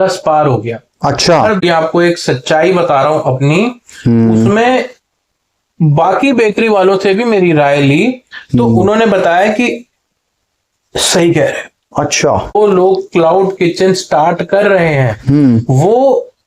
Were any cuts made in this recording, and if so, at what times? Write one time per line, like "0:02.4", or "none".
0:01.6
0:12.6